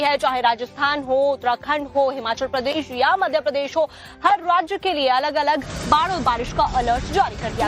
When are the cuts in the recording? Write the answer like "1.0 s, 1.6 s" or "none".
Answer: 2.3 s

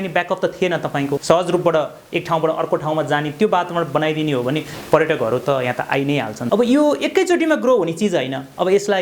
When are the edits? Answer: 1.2 s, 6.4 s

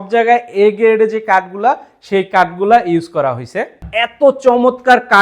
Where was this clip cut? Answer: 3.8 s

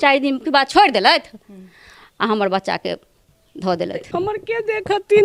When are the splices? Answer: 4.0 s

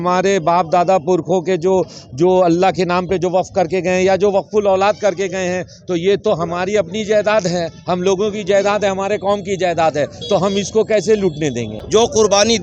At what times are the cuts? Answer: 11.7 s

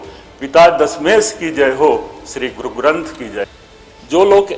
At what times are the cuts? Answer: 3.5 s

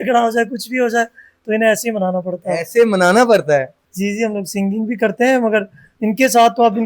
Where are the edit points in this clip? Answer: 3.8 s

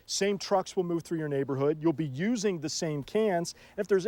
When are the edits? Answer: none

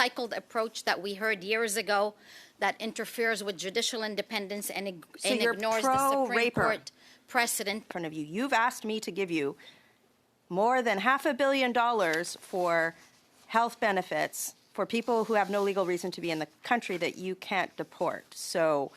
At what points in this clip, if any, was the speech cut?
7.8 s

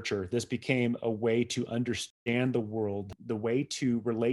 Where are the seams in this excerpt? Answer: 2.0 s, 3.1 s

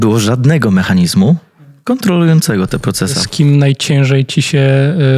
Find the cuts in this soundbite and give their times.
3.2 s

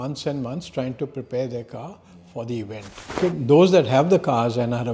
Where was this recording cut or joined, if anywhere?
3.1 s

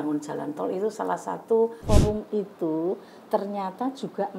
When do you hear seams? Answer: 1.8 s

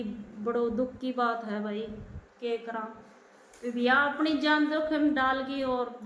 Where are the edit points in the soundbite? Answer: none

